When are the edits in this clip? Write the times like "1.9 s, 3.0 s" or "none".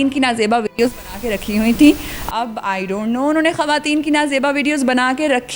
none